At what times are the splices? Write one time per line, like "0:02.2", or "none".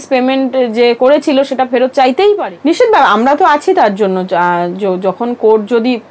0:02.4